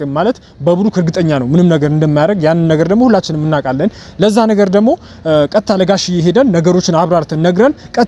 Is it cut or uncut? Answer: uncut